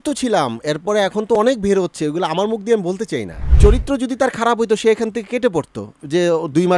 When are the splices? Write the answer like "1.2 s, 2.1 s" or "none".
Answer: 3.4 s